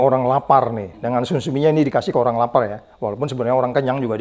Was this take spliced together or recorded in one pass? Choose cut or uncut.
uncut